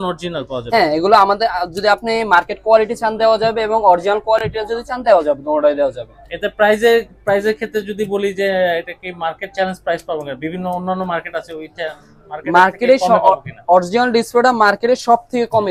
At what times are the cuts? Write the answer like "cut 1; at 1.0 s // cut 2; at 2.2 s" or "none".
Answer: none